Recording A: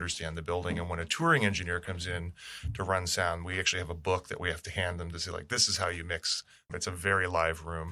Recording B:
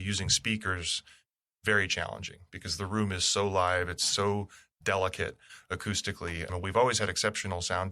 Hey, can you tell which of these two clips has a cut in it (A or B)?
A